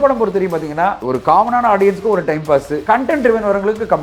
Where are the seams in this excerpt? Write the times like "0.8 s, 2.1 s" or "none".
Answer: 1.0 s, 2.7 s